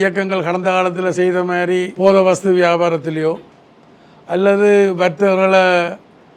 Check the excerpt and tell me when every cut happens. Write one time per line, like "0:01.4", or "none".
0:01.9